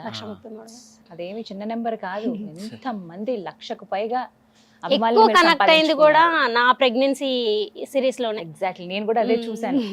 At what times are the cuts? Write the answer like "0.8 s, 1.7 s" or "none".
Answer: none